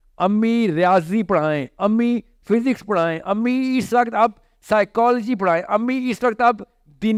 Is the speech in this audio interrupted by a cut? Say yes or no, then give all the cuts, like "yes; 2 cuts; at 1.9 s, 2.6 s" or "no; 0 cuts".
no; 0 cuts